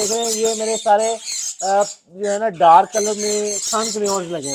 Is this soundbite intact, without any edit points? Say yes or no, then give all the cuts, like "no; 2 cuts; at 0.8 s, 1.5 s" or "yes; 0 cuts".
yes; 0 cuts